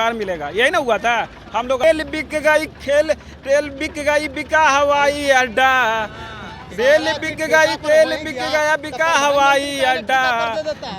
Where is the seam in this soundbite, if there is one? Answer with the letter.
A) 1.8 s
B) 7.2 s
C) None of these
A